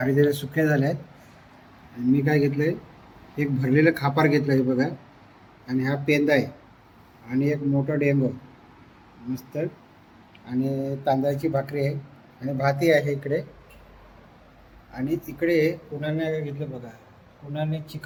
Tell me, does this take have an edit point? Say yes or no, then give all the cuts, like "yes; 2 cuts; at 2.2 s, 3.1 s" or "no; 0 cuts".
no; 0 cuts